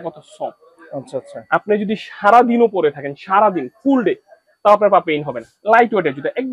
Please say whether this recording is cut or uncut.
uncut